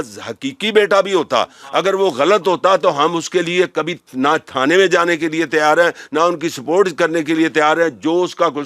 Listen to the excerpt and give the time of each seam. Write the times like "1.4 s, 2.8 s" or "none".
none